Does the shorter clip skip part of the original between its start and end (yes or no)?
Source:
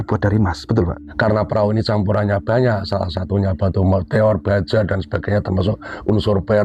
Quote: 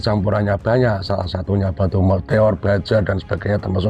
no